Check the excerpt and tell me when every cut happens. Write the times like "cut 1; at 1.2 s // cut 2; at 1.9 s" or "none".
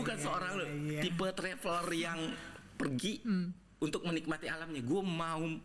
none